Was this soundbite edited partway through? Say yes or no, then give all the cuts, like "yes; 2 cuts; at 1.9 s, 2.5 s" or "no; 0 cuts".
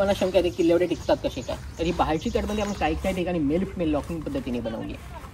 no; 0 cuts